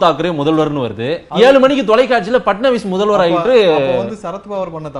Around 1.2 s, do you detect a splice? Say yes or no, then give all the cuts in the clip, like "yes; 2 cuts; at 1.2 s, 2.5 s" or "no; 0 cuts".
yes; 1 cut; at 1.2 s